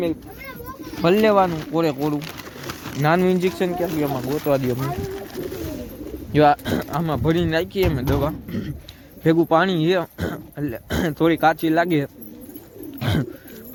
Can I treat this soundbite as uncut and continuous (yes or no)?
yes